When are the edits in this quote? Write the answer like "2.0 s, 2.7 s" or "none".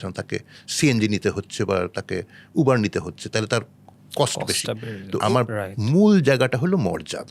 5.1 s